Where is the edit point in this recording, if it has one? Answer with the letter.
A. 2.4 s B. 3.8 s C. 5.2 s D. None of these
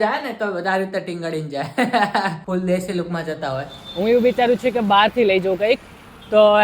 B